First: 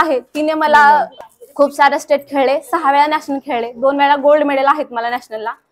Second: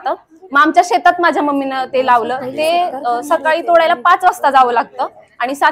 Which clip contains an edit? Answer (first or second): first